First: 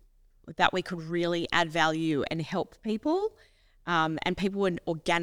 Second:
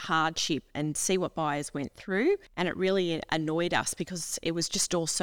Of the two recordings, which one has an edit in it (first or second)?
second